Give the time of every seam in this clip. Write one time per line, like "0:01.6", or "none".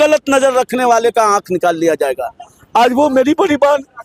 none